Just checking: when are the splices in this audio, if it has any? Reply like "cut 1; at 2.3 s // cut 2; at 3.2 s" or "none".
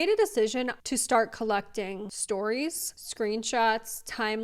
cut 1; at 0.8 s // cut 2; at 2.1 s